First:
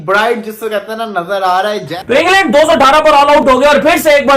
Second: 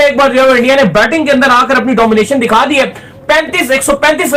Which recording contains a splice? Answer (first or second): first